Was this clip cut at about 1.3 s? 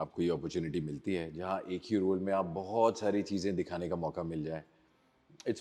no; 0 cuts

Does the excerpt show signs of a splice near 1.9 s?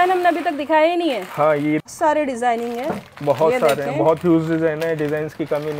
yes; 1 cut; at 1.9 s

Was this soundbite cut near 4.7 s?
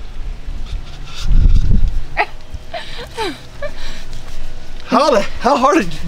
no; 1 cut; at 2.2 s

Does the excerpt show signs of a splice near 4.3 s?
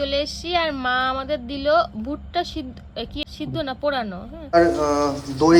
yes; 2 cuts; at 3.2 s, 4.3 s

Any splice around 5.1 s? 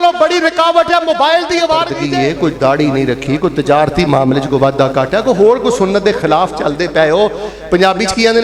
no; 1 cut; at 2.0 s

